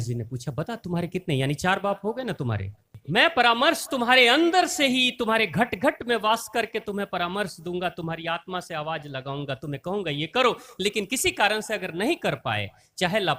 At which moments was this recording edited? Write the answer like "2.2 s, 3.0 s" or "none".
3.0 s